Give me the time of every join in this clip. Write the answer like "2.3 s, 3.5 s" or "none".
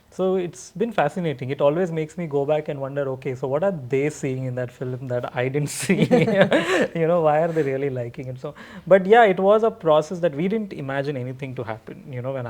none